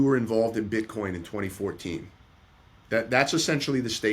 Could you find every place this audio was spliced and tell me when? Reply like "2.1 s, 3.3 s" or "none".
none